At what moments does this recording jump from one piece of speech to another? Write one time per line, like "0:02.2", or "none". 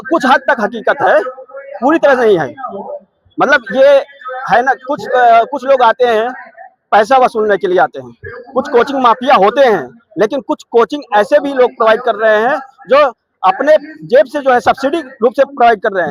none